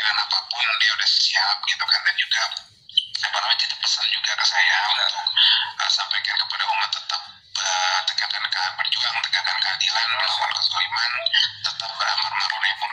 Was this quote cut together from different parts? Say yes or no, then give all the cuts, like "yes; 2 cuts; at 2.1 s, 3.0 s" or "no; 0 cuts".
no; 0 cuts